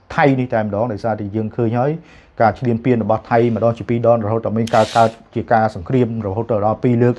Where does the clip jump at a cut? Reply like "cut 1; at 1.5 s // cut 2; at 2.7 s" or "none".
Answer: none